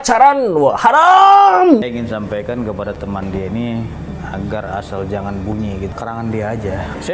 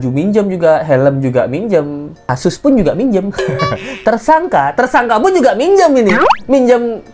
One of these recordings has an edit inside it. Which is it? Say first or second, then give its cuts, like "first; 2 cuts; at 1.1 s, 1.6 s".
first; 2 cuts; at 1.9 s, 5.9 s